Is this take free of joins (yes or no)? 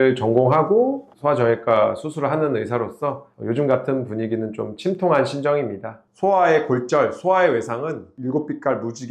no